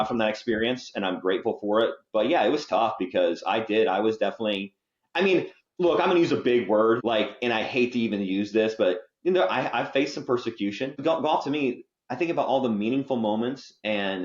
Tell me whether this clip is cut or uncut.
cut